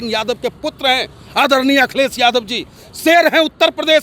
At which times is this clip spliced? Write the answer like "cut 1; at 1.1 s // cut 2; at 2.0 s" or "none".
none